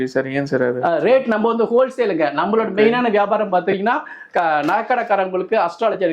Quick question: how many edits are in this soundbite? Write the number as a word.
zero